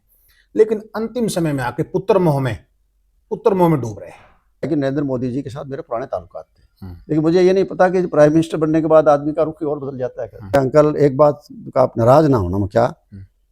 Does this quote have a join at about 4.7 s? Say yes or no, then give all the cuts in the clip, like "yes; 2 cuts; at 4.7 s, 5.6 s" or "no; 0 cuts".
yes; 2 cuts; at 4.7 s, 10.5 s